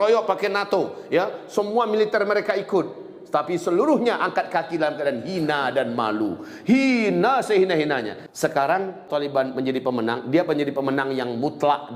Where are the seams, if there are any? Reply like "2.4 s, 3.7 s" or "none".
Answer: 8.2 s, 9.0 s